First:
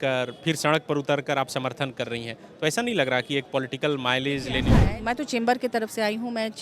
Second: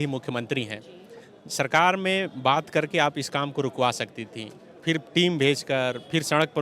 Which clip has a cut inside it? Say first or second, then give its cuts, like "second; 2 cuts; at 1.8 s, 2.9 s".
first; 1 cut; at 4.9 s